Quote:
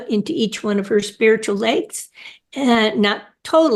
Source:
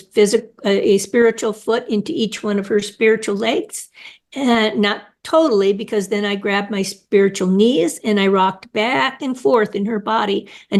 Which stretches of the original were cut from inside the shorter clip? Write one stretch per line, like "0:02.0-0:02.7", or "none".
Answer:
none